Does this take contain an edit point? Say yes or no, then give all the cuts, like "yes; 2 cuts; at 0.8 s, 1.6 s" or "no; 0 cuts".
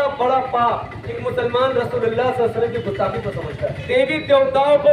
yes; 2 cuts; at 1.2 s, 3.9 s